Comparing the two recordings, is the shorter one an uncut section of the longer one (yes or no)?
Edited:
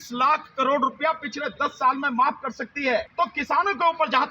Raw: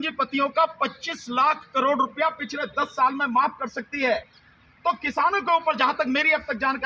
no